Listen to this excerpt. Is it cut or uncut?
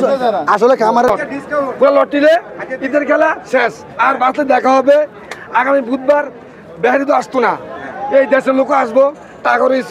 cut